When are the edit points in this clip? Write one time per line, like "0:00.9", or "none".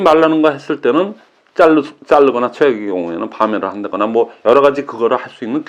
none